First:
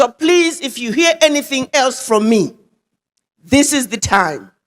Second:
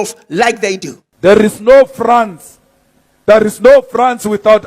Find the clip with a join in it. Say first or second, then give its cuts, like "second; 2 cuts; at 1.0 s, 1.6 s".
second; 1 cut; at 1.1 s